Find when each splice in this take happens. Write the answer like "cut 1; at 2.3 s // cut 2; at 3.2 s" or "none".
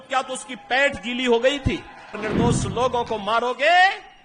cut 1; at 2.2 s